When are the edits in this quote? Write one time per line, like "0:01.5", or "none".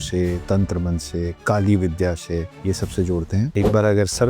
0:01.3
0:02.5
0:03.5